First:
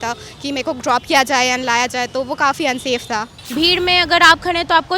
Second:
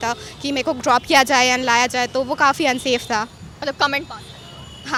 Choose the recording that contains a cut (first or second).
first